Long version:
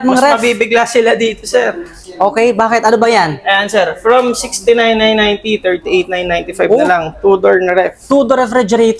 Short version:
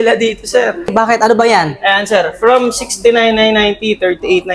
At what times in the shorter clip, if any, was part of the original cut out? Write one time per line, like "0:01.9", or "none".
0:00.9

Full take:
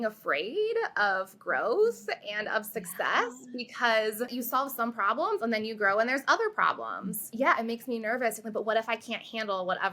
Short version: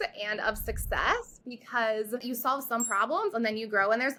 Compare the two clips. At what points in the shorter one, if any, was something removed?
none

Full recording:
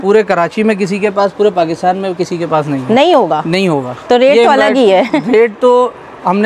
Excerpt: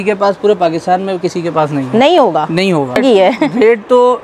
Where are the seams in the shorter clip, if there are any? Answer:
0:03.0

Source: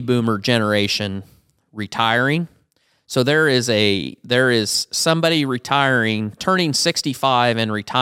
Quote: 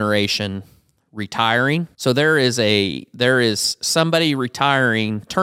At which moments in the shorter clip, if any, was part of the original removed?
0:01.9

